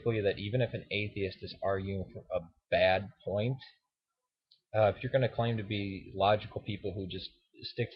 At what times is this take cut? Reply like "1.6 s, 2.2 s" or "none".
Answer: 2.2 s